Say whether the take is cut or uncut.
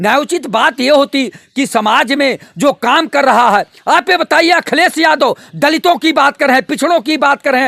uncut